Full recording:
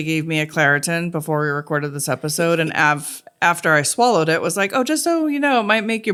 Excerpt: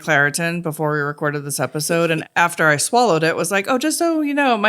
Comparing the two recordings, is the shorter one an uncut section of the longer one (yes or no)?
no